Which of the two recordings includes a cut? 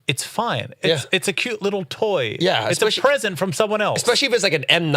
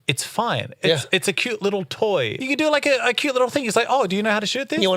second; 1 cut; at 2.3 s

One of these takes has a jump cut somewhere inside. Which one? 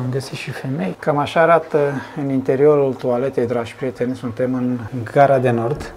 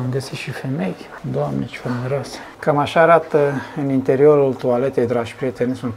first; 2 cuts; at 1.0 s, 4.9 s

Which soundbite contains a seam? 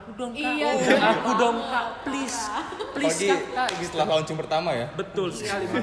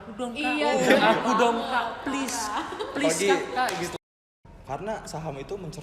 second; 1 cut; at 3.9 s

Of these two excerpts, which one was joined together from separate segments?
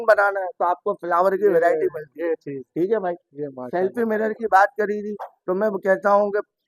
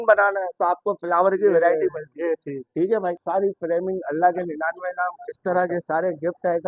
second; 1 cut; at 3.2 s

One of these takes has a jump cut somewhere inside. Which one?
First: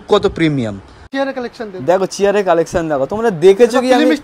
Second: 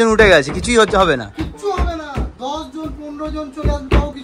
first; 1 cut; at 1.0 s

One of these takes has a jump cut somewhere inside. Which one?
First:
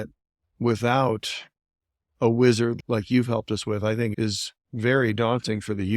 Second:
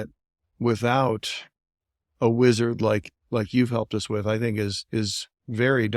first; 2 cuts; at 2.8 s, 4.1 s

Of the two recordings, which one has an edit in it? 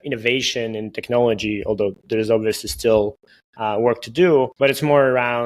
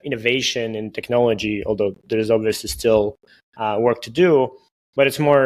first; 1 cut; at 4.5 s

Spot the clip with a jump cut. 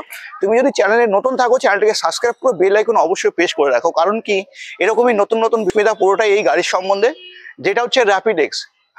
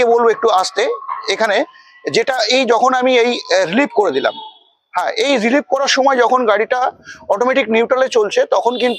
first; 1 cut; at 5.7 s

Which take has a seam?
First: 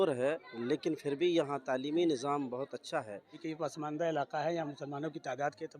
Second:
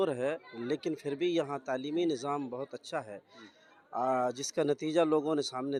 first; 1 cut; at 3.5 s

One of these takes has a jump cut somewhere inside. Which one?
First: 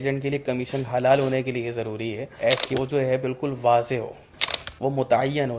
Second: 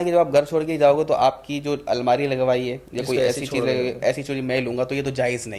first; 1 cut; at 2.3 s

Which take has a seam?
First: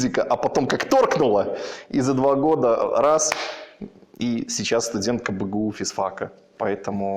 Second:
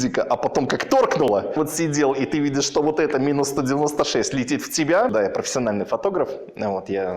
second; 2 cuts; at 1.5 s, 5.1 s

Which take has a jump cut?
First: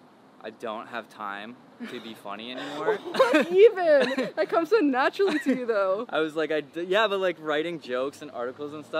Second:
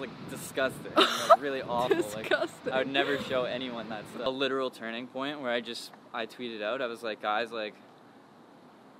second; 1 cut; at 4.3 s

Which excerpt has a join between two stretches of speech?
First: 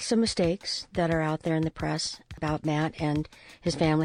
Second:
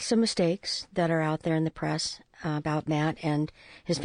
first; 1 cut; at 2.4 s

